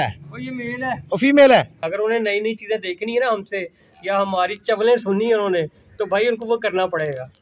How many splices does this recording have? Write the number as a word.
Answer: one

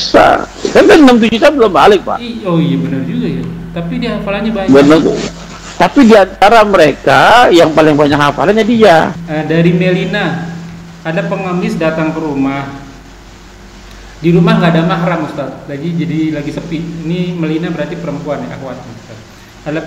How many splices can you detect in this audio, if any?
one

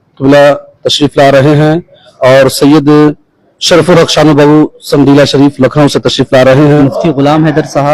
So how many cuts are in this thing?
one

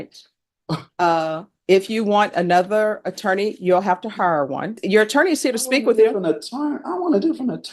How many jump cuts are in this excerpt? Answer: one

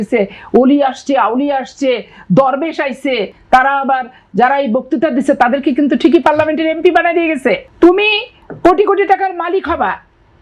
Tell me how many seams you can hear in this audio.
two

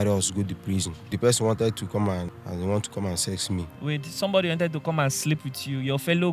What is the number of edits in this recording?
three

